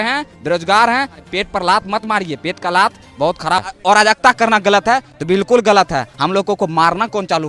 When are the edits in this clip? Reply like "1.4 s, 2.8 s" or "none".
1.2 s, 3.7 s